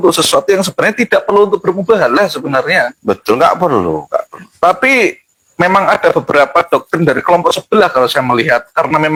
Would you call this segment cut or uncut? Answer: uncut